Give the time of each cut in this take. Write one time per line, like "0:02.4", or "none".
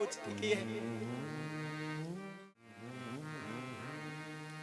0:02.3